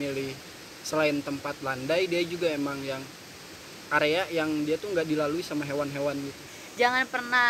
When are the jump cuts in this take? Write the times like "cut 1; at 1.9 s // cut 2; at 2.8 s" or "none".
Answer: cut 1; at 6.6 s

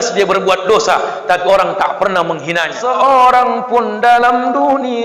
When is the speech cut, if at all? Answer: cut 1; at 2.8 s

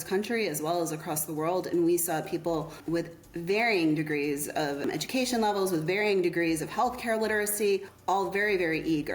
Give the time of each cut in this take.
cut 1; at 2.8 s // cut 2; at 4.8 s // cut 3; at 7.9 s

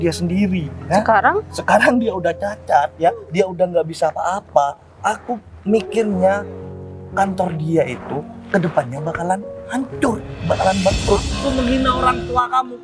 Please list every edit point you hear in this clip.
cut 1; at 11.3 s

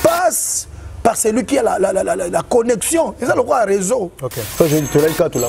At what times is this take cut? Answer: cut 1; at 4.4 s

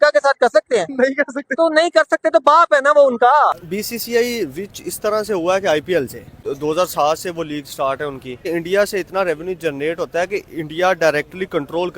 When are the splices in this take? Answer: cut 1; at 3.7 s // cut 2; at 6.5 s // cut 3; at 8.5 s

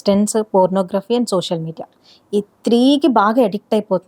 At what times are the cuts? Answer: none

